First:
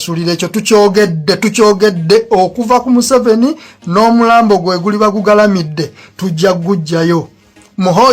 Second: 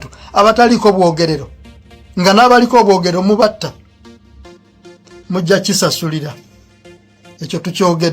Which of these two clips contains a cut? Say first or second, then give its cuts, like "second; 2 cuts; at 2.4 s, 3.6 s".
second; 1 cut; at 0.9 s